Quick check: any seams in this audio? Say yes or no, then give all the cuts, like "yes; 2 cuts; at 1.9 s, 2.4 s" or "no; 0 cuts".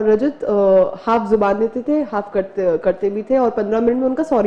no; 0 cuts